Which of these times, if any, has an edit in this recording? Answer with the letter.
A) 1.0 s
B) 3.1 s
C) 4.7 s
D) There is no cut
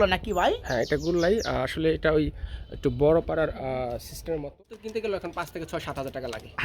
C